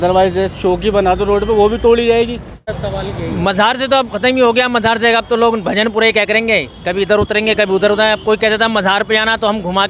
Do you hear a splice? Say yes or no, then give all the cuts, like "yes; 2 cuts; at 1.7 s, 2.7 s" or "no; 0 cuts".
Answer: yes; 1 cut; at 2.8 s